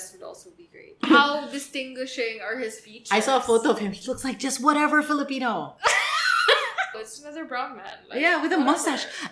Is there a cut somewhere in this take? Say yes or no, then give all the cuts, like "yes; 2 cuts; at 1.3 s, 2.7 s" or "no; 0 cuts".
yes; 2 cuts; at 1.1 s, 7.0 s